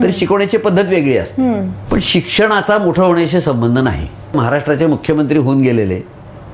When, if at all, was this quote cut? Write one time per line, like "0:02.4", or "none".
0:01.7
0:04.4

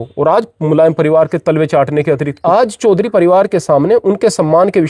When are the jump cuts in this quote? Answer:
0:02.3

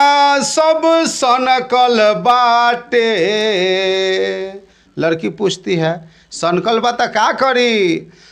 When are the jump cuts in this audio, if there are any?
none

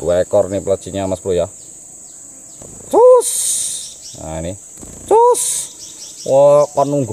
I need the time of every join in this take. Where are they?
none

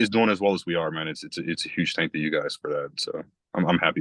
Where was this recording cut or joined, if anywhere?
none

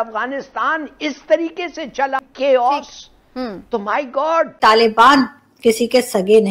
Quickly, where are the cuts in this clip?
0:02.2
0:04.5

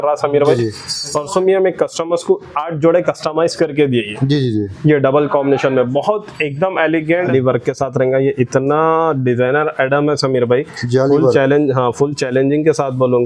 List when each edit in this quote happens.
0:07.3

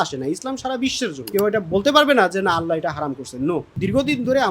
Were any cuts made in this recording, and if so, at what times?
0:01.3
0:03.7

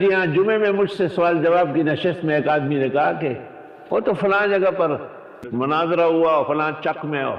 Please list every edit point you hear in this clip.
0:05.5

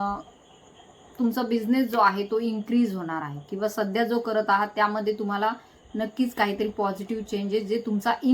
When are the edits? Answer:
none

